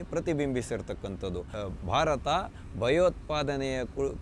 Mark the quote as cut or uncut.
cut